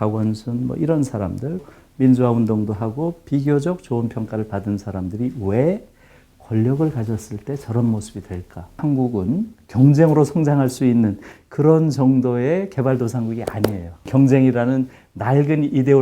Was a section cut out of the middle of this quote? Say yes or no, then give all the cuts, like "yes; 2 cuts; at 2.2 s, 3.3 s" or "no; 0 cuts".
yes; 3 cuts; at 1.6 s, 8.8 s, 14.1 s